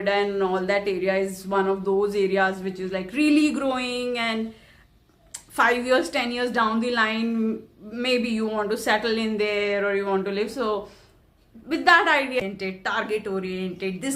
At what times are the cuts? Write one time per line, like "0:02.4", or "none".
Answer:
0:12.4